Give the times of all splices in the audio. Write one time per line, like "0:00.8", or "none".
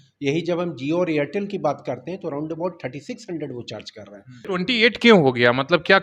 0:04.5

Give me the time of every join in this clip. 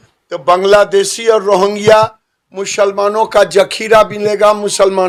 none

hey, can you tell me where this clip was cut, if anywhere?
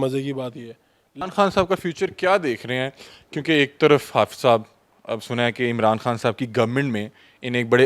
0:01.2

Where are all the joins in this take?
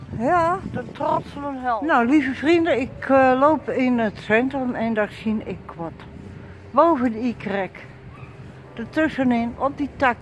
0:01.8

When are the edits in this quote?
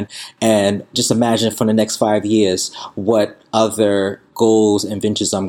0:00.9
0:04.3

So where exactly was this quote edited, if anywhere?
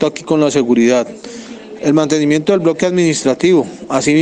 none

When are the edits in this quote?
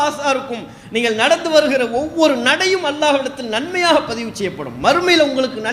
none

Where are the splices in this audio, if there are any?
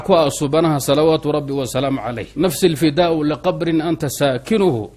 0:02.2

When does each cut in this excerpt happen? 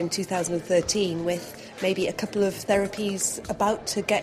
none

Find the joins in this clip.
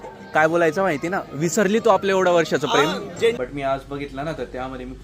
0:03.4

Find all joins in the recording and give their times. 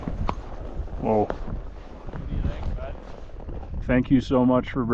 0:03.8

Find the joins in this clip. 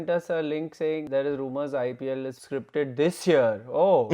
0:01.0
0:02.4

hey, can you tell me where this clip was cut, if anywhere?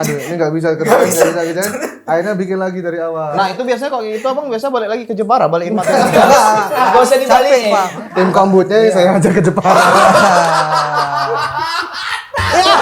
0:03.3
0:07.9

